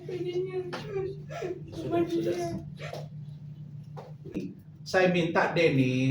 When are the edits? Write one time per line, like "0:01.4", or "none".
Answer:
0:04.4